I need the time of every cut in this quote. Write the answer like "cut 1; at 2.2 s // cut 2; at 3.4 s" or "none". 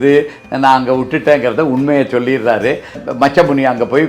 cut 1; at 2.9 s